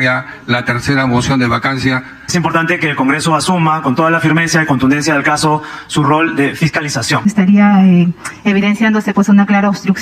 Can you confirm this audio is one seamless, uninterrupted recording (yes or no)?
no